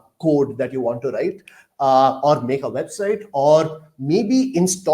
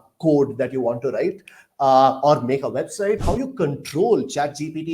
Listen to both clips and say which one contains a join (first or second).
second